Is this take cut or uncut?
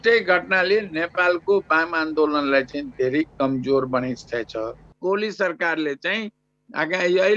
cut